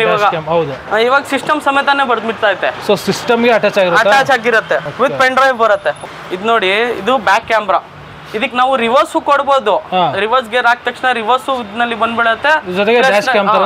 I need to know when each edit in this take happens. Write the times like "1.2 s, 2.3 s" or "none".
4.9 s, 6.0 s